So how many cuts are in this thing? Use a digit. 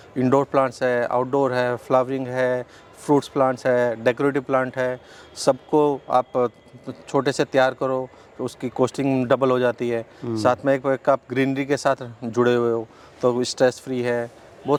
0